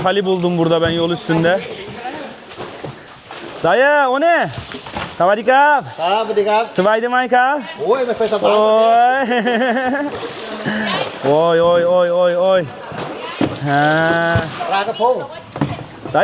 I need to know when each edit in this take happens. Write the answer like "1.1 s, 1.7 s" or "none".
none